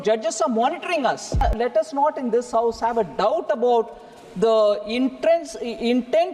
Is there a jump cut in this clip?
yes; 1 cut; at 1.4 s

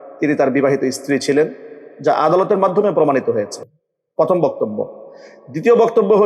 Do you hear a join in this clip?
no; 0 cuts

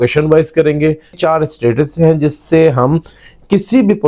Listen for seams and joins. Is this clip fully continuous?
no; 1 cut; at 1.2 s

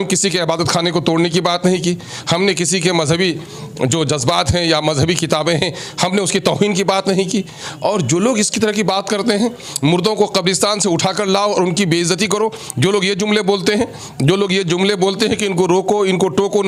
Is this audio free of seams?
yes; 0 cuts

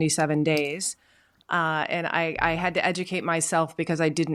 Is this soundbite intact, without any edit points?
yes; 0 cuts

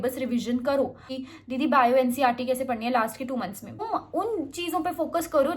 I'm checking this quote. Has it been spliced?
yes; 2 cuts; at 1.1 s, 3.9 s

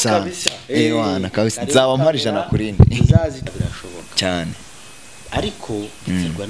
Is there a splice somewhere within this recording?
yes; 1 cut; at 3.4 s

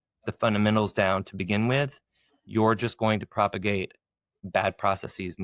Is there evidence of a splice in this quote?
no; 0 cuts

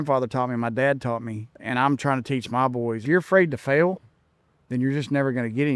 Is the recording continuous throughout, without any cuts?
no; 2 cuts; at 1.6 s, 3.0 s

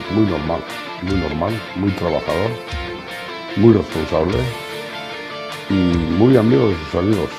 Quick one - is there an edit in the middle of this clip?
no; 0 cuts

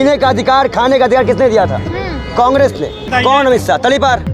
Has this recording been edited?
yes; 1 cut; at 3.0 s

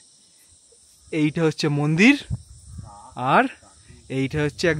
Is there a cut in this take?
no; 0 cuts

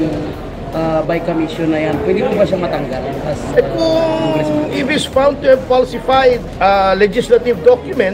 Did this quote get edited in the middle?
yes; 1 cut; at 6.5 s

